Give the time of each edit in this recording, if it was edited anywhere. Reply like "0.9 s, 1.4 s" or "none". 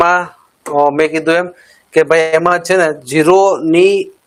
none